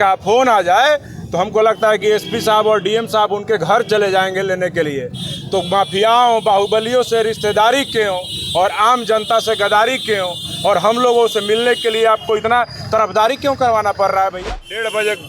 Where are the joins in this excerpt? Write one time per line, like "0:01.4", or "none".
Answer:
0:14.4